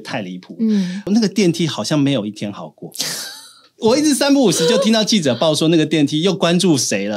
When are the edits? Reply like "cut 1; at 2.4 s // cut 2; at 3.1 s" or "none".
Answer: cut 1; at 1.1 s